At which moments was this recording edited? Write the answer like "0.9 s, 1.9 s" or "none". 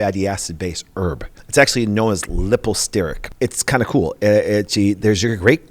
1.3 s, 3.2 s